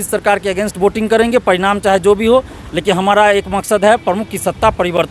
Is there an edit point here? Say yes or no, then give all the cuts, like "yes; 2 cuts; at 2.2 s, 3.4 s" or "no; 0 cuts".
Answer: no; 0 cuts